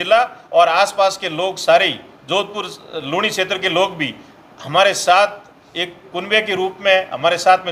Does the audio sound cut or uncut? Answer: uncut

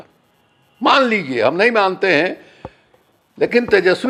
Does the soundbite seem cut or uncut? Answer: uncut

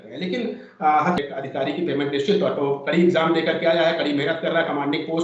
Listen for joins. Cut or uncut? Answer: cut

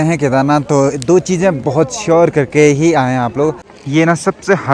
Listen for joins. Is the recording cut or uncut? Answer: cut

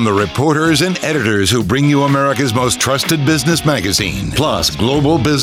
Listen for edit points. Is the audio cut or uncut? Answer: uncut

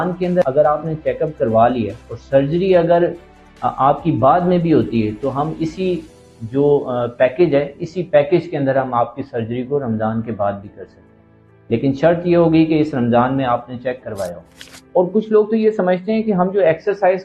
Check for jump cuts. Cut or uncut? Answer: cut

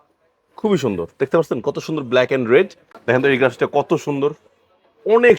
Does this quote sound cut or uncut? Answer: cut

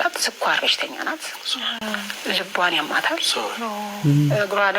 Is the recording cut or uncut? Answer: cut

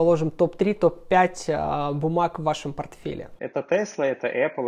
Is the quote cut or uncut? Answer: cut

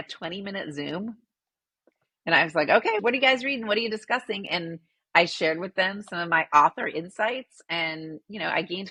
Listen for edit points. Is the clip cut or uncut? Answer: uncut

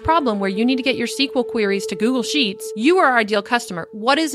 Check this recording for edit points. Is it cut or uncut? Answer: cut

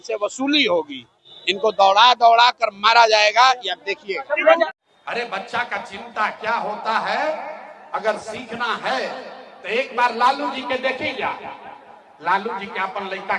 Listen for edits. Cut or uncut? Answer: cut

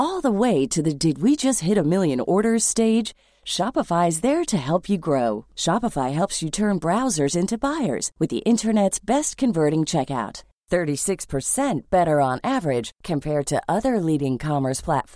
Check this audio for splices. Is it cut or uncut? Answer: uncut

